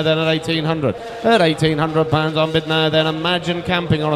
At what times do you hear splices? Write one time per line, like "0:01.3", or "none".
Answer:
0:01.0